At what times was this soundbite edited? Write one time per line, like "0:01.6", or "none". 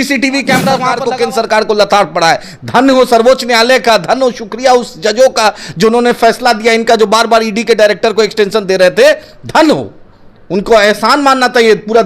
0:01.0